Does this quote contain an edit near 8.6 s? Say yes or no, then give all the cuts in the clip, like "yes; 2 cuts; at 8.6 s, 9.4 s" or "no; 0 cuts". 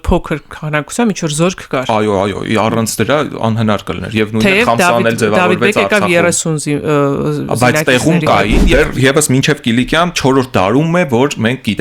yes; 1 cut; at 8.6 s